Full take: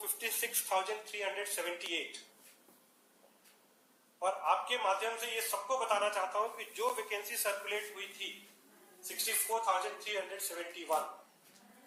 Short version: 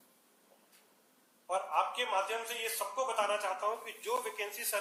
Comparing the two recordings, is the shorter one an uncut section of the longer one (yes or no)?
yes